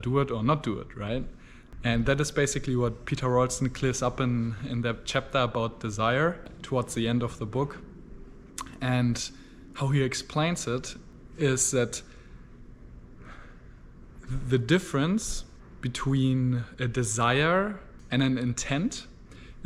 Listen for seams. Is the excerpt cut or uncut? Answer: uncut